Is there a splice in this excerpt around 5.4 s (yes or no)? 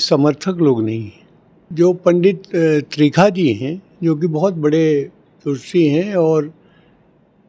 no